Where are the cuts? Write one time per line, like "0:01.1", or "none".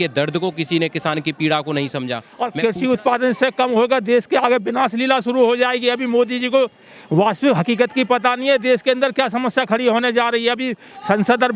0:02.2